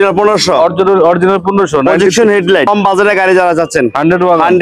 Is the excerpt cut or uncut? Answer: cut